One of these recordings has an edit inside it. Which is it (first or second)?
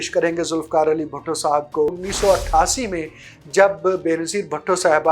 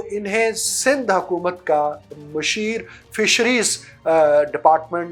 first